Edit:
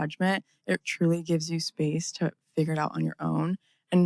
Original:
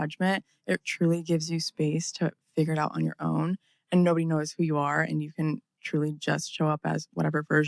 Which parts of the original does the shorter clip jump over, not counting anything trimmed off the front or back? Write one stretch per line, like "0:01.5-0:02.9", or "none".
none

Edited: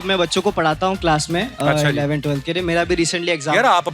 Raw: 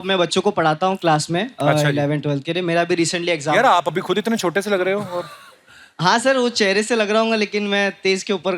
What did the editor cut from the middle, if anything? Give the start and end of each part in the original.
none

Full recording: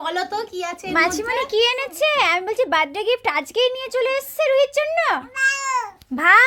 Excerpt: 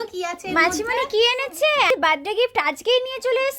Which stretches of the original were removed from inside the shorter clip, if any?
0:02.3-0:02.6

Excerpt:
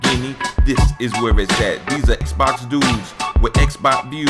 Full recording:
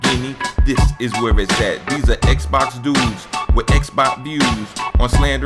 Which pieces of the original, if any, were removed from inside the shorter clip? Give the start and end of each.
0:02.2-0:02.3

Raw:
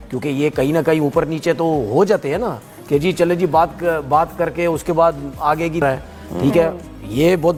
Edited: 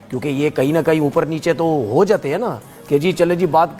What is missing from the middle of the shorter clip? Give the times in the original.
none

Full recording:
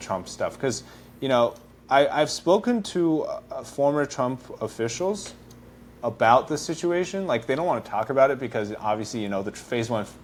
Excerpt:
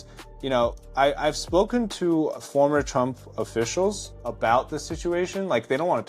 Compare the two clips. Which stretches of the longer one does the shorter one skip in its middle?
0:01.6-0:01.8
0:03.3-0:03.6
0:05.3-0:05.9

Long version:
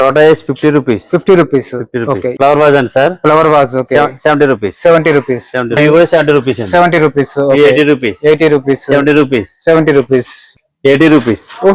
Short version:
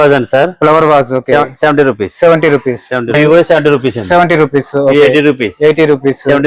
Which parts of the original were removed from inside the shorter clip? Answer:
none

